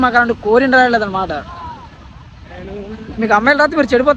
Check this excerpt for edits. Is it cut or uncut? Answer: uncut